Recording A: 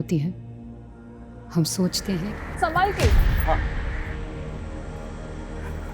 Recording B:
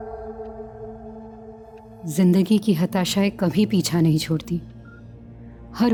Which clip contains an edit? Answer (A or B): A